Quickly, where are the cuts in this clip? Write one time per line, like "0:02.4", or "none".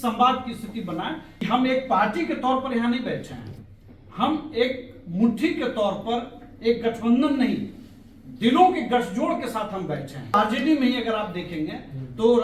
0:01.5
0:10.3